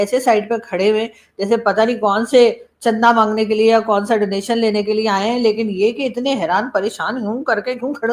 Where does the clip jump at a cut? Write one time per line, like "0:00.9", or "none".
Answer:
none